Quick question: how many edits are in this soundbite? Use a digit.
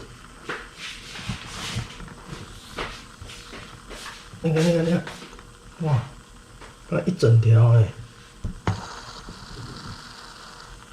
1